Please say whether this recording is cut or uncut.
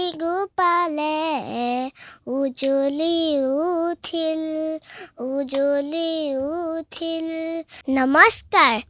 cut